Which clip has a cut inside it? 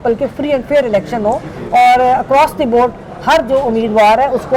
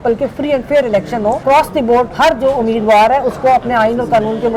second; 1 cut; at 1.8 s

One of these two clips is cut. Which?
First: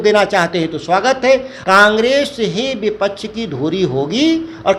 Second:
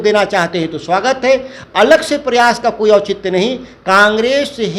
first; 1 cut; at 1.5 s

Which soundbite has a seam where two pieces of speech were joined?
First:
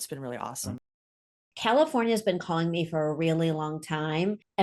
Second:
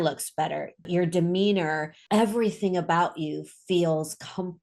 first; 1 cut; at 1.3 s

